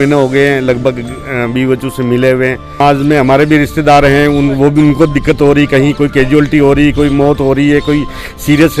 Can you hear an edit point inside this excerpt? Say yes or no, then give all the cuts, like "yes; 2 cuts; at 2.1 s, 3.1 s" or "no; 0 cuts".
yes; 1 cut; at 2.8 s